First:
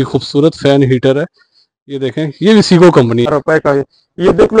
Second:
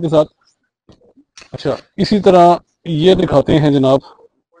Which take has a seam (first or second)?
first